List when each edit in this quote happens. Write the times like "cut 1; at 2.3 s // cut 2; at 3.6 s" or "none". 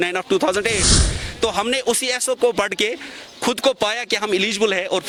none